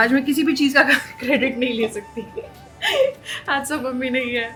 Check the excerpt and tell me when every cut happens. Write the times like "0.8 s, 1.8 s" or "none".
none